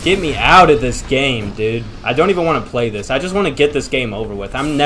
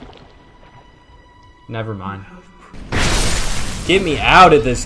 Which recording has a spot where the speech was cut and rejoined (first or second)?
second